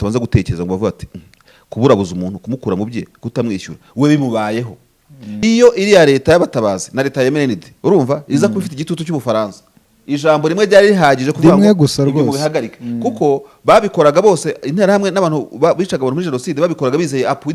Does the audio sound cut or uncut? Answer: cut